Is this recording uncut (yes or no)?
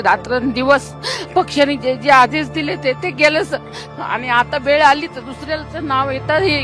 yes